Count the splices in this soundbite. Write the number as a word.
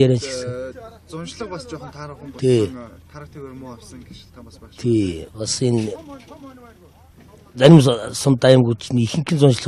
zero